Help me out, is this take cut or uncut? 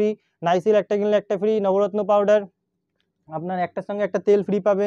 uncut